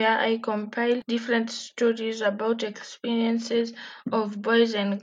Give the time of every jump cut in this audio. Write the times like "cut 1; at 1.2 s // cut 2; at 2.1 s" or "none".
cut 1; at 1.0 s